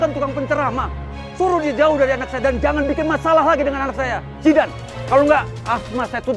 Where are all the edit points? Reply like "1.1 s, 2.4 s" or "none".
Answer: 4.8 s